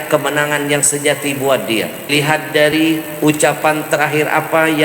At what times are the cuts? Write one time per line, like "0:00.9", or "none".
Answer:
0:02.1